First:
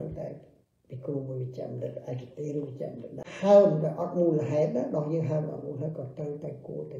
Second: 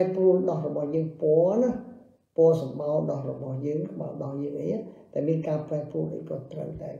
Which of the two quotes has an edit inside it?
first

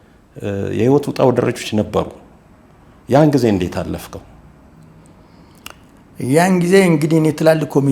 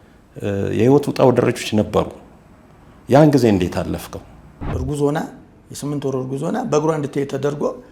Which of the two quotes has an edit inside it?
second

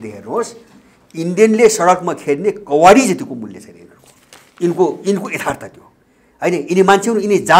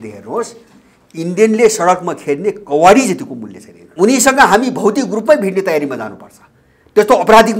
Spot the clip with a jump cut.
second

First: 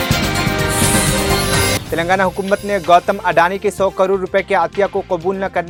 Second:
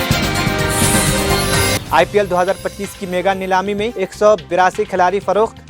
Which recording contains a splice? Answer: second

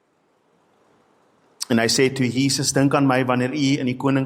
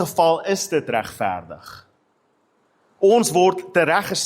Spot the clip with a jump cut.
first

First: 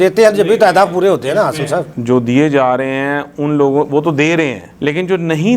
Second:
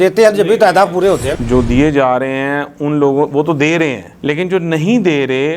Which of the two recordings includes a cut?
second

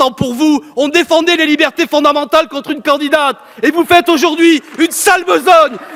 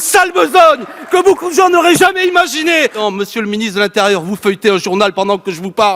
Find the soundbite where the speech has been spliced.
second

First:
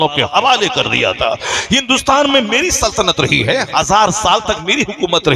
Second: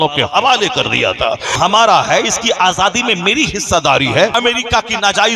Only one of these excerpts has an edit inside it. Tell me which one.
second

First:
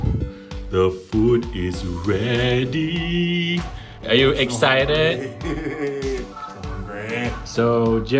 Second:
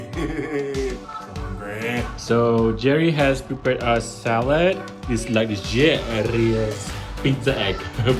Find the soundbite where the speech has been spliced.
second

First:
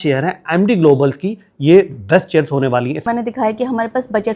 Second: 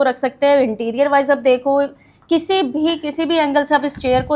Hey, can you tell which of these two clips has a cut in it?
first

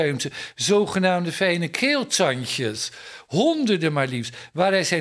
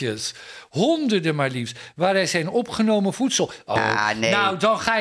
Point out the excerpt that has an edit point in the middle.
second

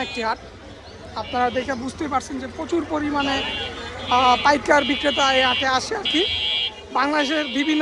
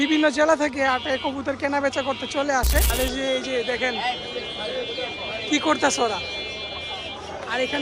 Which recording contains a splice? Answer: second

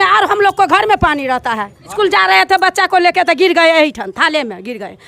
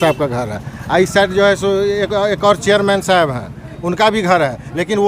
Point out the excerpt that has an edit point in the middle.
first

